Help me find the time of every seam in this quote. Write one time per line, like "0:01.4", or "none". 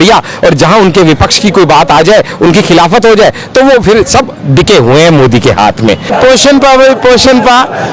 0:06.1